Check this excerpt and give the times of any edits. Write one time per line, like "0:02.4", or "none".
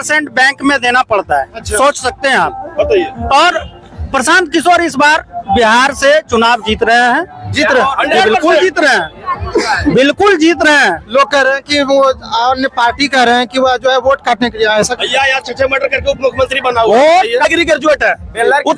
0:17.4